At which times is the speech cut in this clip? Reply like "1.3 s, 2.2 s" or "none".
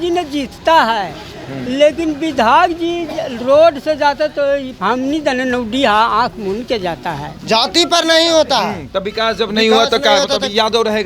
4.7 s, 7.3 s